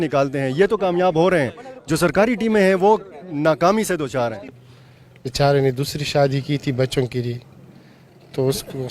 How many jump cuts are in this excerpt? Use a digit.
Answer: 1